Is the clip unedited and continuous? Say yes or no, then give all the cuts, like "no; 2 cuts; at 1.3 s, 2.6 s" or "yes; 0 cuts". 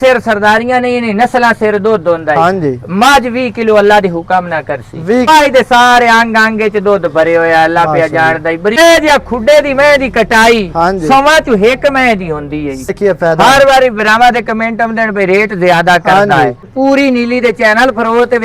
no; 4 cuts; at 5.3 s, 8.8 s, 12.9 s, 16.7 s